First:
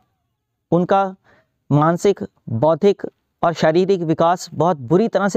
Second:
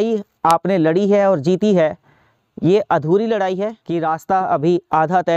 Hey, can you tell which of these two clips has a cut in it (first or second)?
second